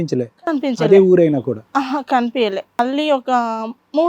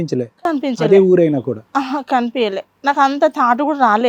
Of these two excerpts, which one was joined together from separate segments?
first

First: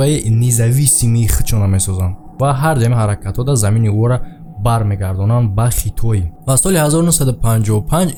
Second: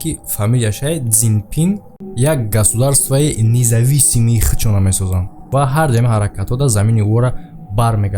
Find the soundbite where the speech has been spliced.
second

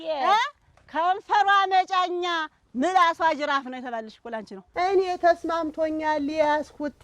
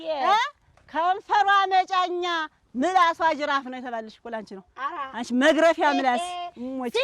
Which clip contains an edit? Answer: first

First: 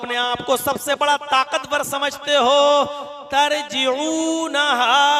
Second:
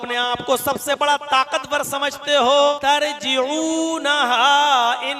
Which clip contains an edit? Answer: second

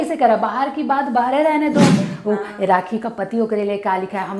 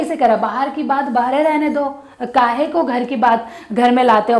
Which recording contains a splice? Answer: first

